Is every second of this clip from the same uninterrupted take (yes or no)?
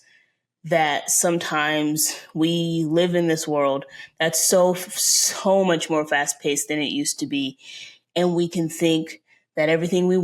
yes